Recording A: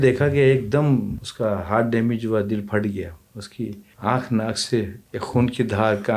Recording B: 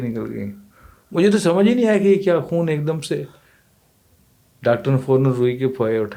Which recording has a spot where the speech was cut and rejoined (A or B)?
A